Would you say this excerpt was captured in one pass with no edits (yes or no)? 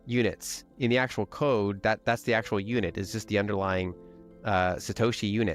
yes